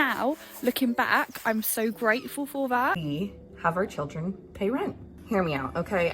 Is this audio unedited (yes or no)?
no